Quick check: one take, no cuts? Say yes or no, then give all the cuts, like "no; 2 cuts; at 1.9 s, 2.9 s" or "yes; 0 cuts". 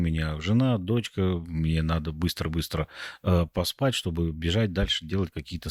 yes; 0 cuts